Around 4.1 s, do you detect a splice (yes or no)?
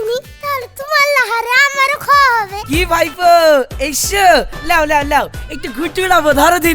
no